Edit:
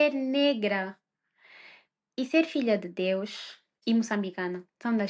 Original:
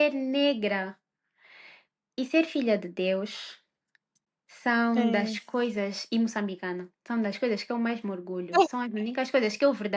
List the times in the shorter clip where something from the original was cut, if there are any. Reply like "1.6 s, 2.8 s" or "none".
3.8 s